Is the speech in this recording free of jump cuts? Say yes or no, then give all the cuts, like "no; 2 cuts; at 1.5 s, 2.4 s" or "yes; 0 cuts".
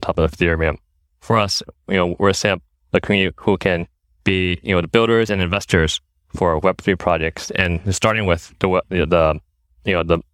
yes; 0 cuts